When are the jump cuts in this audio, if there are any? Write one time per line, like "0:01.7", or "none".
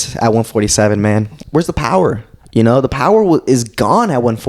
0:01.3